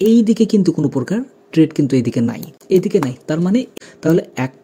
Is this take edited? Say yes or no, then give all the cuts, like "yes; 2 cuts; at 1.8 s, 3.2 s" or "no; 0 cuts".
yes; 2 cuts; at 2.5 s, 3.7 s